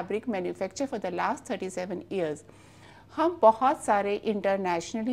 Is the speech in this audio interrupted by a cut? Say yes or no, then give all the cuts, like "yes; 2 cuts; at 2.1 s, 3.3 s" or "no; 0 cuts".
no; 0 cuts